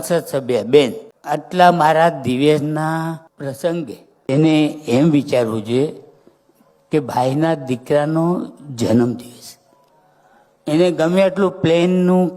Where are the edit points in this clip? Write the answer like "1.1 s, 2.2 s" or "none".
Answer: 1.1 s, 3.3 s